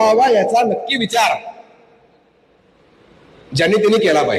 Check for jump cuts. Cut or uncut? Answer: uncut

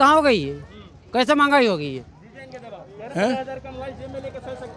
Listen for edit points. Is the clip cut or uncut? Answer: uncut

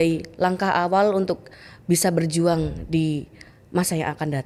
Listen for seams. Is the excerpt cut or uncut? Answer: uncut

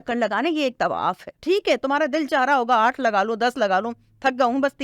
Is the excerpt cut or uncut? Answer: cut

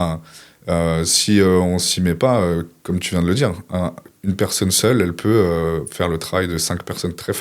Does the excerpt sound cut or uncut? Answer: uncut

